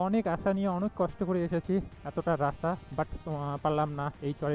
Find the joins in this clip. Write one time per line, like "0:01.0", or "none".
none